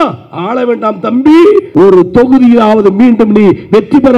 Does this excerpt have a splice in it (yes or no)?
yes